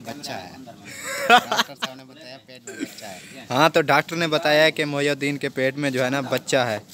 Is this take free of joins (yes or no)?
yes